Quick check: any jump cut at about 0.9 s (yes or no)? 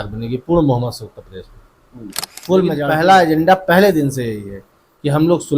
no